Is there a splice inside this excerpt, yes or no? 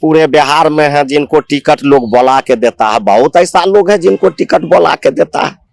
no